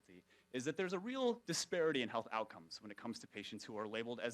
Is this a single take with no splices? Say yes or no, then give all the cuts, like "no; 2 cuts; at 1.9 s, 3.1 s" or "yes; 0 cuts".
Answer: no; 1 cut; at 1.3 s